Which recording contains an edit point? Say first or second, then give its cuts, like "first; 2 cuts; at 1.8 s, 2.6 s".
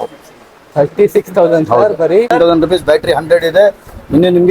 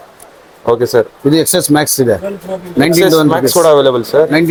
first; 1 cut; at 2.3 s